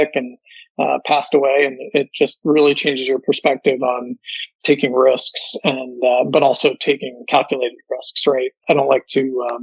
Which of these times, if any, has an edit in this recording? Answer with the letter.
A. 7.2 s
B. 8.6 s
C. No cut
B